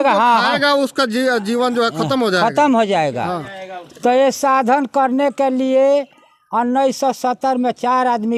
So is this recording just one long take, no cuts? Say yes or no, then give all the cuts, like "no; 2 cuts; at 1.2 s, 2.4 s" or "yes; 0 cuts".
yes; 0 cuts